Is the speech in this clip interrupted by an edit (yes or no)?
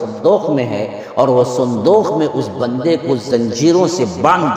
no